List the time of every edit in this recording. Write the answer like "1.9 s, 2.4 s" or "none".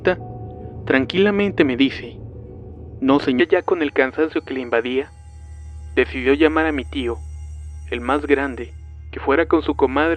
none